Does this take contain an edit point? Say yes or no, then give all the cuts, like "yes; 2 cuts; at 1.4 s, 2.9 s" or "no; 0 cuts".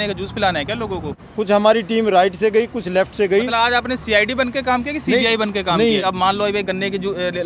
yes; 2 cuts; at 1.2 s, 6.0 s